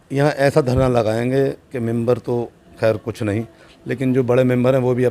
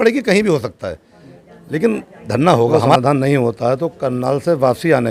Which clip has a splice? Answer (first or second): second